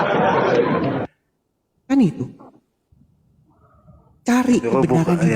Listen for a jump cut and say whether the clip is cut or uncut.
cut